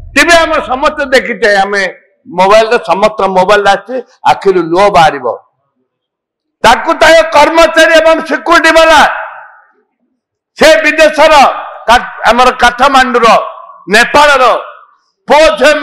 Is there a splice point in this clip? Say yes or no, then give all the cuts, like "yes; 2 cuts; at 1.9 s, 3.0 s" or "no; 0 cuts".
no; 0 cuts